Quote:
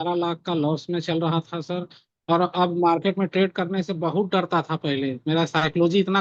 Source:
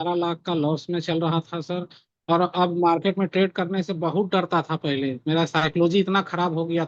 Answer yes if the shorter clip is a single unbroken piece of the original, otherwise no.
yes